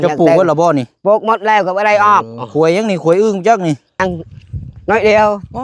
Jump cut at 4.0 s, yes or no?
yes